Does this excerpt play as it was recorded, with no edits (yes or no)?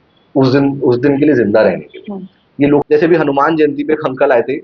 no